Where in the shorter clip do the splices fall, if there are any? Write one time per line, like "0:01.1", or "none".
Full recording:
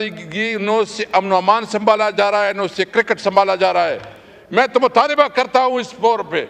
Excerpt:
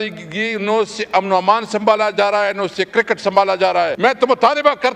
0:03.9